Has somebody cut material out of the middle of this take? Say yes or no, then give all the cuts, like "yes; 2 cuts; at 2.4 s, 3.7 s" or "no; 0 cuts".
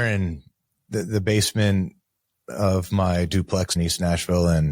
yes; 1 cut; at 3.7 s